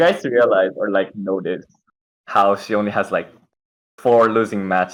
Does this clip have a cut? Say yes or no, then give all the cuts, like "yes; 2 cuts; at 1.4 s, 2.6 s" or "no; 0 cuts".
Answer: no; 0 cuts